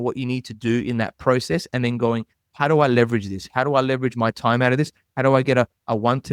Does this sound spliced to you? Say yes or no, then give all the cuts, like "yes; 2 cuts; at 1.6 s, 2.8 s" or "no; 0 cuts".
no; 0 cuts